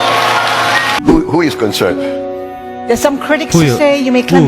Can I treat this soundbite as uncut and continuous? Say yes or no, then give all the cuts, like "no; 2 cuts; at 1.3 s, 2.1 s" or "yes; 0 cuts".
no; 1 cut; at 1.0 s